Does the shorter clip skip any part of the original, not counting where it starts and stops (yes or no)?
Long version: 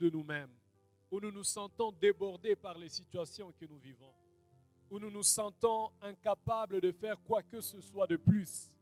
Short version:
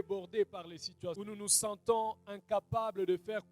yes